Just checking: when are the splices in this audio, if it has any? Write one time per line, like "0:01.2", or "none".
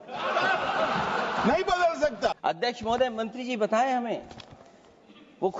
0:02.4